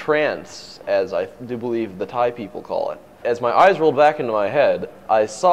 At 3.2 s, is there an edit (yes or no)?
yes